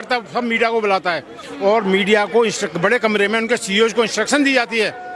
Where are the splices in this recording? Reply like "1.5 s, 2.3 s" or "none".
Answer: none